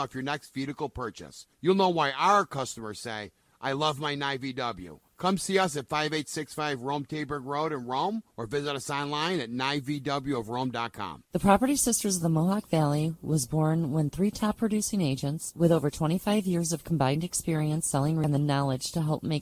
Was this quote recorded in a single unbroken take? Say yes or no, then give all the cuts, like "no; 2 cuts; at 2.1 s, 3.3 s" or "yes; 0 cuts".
no; 1 cut; at 18.2 s